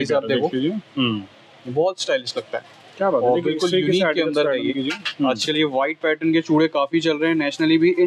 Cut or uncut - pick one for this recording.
uncut